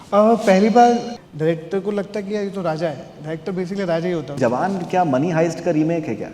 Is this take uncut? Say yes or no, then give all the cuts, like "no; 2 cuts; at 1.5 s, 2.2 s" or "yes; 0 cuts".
no; 2 cuts; at 1.2 s, 4.4 s